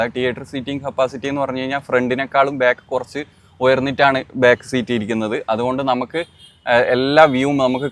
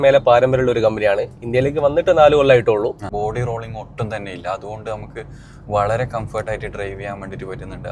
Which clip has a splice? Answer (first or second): second